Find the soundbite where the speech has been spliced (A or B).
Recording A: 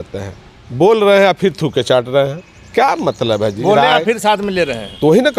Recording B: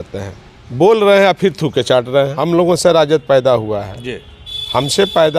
B